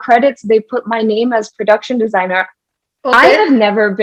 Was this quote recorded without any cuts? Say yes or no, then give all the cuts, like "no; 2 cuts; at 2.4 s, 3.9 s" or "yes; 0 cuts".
yes; 0 cuts